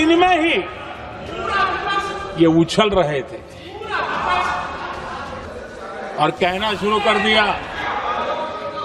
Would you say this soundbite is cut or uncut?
cut